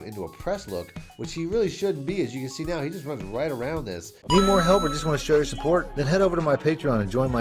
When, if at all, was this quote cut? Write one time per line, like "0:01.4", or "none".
0:04.2

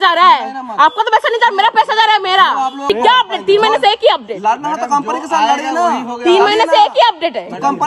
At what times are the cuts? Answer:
0:02.9

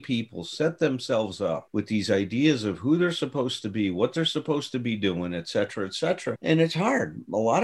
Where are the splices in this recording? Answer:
none

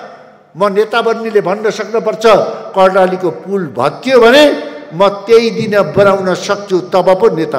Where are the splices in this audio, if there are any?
none

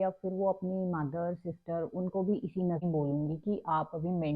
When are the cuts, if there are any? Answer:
0:02.8

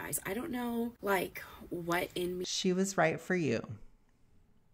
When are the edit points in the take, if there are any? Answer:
none

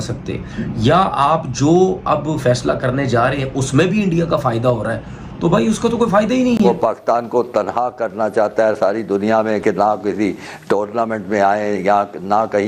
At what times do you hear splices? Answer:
0:06.7

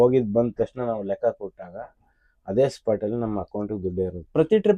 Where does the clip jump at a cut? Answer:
none

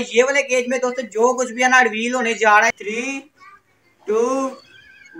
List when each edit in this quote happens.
0:02.7

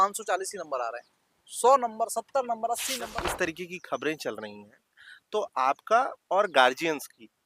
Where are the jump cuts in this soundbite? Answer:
0:03.1

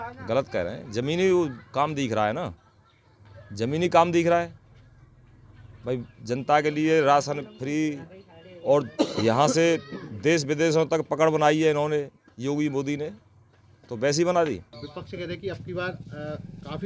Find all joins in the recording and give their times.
0:14.8

